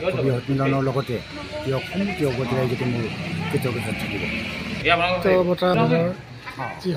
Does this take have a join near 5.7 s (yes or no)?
yes